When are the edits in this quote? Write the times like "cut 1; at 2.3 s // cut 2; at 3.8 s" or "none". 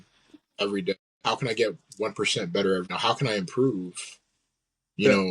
cut 1; at 1.1 s // cut 2; at 2.9 s